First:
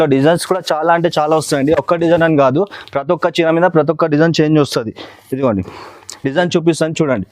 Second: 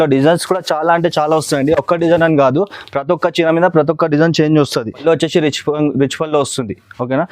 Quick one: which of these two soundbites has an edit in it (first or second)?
second